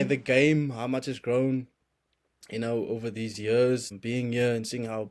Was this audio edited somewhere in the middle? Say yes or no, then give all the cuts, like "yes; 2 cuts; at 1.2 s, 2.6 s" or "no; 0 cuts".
yes; 1 cut; at 3.9 s